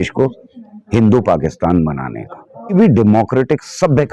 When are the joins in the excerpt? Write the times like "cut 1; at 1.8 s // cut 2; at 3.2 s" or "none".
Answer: cut 1; at 2.7 s